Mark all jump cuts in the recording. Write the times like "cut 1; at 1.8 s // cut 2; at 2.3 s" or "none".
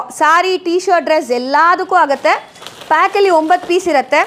none

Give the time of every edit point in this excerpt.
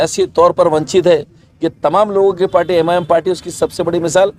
none

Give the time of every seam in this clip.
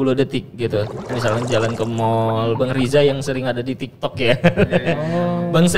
cut 1; at 1.2 s

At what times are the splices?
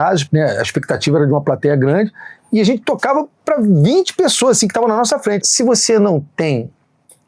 cut 1; at 5.4 s

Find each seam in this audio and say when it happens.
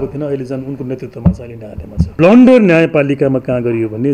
cut 1; at 2.1 s

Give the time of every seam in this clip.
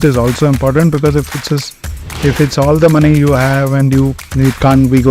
cut 1; at 4.2 s

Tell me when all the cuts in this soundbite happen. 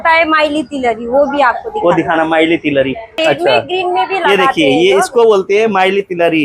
cut 1; at 3.2 s

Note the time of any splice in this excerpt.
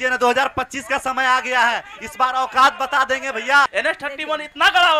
cut 1; at 3.7 s

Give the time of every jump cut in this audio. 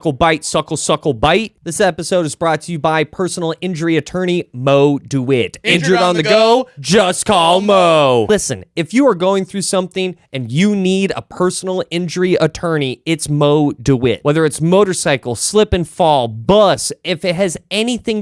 cut 1; at 1.5 s

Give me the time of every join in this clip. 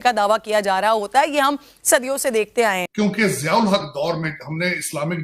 cut 1; at 2.9 s

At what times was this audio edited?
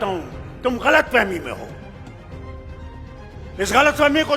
cut 1; at 1.7 s // cut 2; at 3.1 s

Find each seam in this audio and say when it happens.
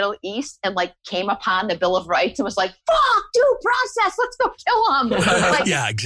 none

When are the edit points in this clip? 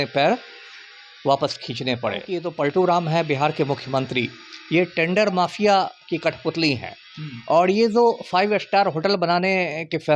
cut 1; at 2.4 s

